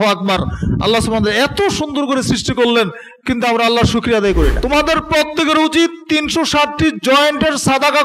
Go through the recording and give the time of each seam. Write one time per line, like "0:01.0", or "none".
0:04.6